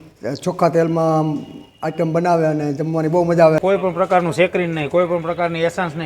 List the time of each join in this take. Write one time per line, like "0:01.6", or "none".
0:03.6